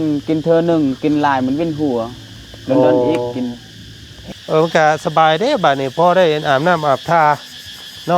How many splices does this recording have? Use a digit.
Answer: 1